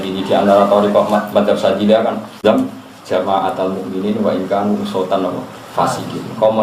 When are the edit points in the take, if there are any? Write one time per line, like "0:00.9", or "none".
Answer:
0:02.4